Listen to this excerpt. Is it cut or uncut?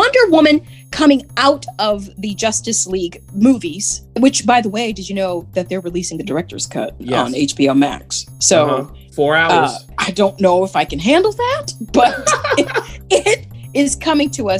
cut